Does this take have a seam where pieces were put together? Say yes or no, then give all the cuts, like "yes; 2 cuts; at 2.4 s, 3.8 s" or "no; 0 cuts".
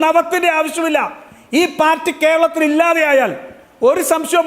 yes; 1 cut; at 1.2 s